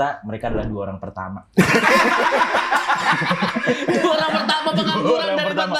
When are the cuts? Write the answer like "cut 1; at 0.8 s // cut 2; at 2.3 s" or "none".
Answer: none